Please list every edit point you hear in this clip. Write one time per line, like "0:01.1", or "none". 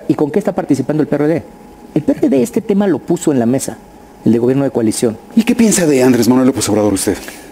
0:05.2